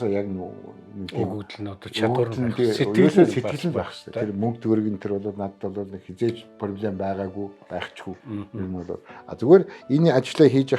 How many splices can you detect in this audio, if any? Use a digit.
1